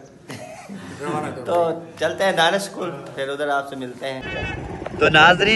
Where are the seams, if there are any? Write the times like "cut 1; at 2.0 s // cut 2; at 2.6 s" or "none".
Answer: cut 1; at 4.3 s